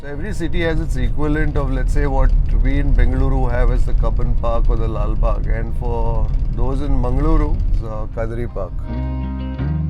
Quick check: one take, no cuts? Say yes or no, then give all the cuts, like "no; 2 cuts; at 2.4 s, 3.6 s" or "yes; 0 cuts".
no; 2 cuts; at 7.7 s, 8.8 s